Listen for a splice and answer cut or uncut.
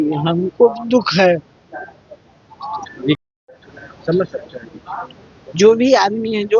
uncut